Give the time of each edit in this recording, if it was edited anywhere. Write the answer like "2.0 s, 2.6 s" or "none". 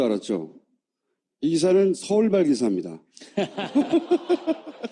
1.7 s